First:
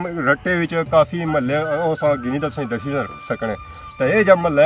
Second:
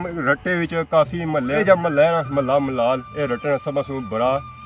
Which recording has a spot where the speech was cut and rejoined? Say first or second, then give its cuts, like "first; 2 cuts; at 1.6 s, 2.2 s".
second; 1 cut; at 1.6 s